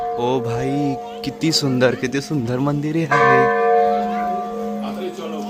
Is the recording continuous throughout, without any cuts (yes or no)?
yes